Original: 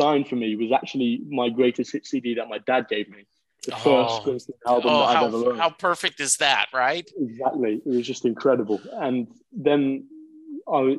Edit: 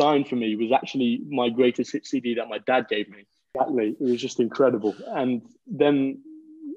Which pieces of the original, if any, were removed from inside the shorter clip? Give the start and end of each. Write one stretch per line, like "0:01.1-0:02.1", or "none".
0:03.5-0:07.3